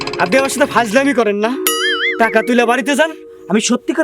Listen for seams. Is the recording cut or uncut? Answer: uncut